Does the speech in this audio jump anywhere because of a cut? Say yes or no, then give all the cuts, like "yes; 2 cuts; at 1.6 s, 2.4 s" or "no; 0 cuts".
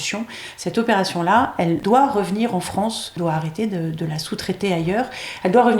yes; 2 cuts; at 1.8 s, 3.1 s